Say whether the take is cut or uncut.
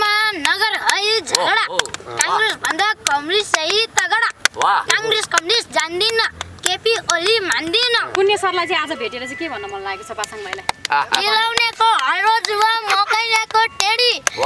cut